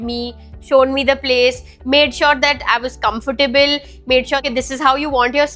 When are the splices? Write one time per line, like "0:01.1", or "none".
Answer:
0:04.4

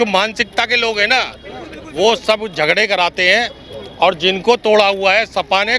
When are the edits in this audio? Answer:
none

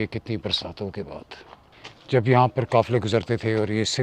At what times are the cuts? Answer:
0:01.9

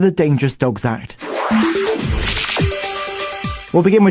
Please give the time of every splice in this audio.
0:01.1

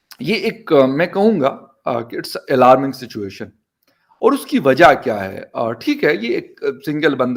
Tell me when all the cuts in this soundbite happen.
none

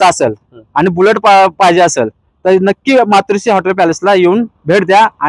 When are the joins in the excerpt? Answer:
none

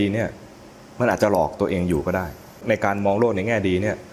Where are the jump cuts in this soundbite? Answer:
0:02.6

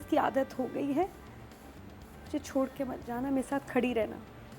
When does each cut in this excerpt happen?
none

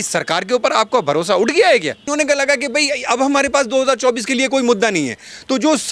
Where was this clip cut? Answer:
0:02.0

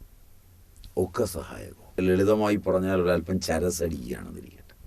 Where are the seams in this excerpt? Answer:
0:02.0

